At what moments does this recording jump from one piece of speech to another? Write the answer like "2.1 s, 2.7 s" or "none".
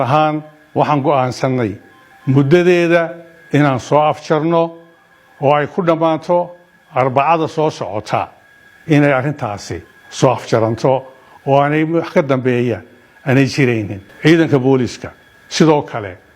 14.0 s